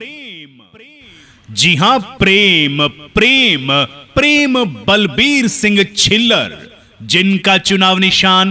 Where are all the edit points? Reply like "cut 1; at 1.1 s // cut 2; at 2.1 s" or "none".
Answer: cut 1; at 1.0 s